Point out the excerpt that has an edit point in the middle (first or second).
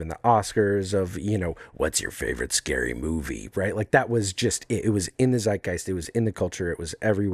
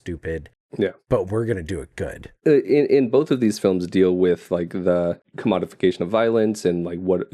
second